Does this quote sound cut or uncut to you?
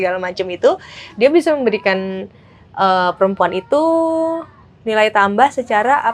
uncut